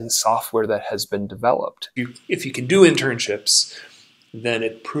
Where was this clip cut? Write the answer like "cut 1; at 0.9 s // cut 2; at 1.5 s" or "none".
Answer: cut 1; at 1.9 s